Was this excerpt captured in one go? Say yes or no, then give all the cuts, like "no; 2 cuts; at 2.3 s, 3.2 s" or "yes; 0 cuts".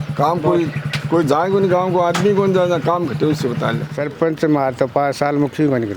no; 1 cut; at 3.9 s